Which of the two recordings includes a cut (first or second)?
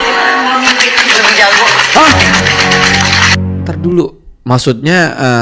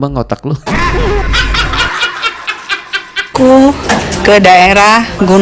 second